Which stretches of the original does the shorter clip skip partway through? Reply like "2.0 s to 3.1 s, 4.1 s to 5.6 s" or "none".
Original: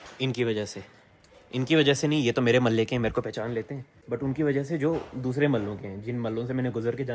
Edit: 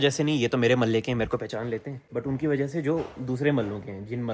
3.8 s to 3.9 s